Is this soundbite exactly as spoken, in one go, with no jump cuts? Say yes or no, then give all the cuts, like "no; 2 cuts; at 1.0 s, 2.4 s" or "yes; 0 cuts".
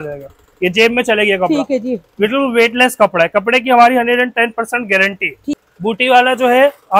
no; 1 cut; at 5.6 s